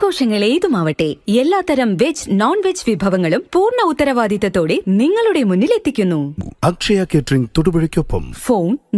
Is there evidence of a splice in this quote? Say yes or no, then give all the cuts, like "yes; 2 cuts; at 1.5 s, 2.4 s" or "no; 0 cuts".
yes; 1 cut; at 6.3 s